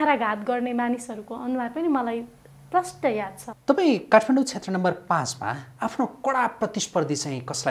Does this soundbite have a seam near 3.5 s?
yes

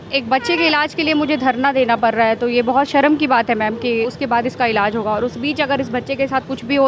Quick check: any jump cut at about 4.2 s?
yes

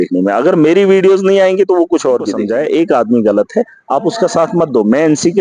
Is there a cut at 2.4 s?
yes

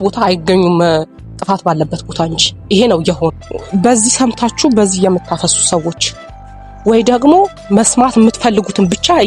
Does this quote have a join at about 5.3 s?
no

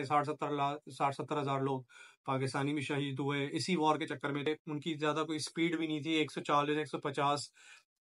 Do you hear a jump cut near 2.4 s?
no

